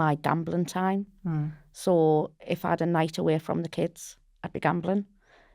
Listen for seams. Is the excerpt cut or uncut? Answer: uncut